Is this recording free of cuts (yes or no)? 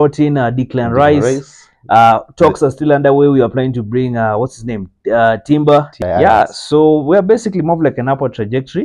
no